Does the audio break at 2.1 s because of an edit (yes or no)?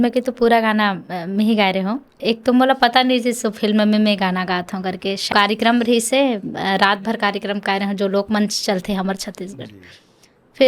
yes